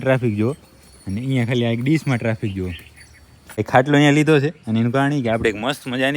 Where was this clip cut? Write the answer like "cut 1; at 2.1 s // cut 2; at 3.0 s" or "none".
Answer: cut 1; at 3.7 s